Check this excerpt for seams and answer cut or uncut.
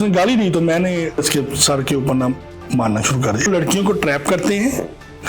cut